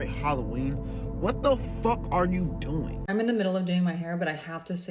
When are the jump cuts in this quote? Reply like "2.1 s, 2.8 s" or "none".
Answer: 3.0 s